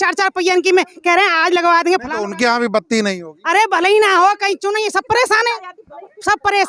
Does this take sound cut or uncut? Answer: uncut